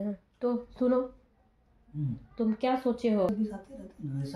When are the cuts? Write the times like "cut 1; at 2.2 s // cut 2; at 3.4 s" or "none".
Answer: cut 1; at 3.3 s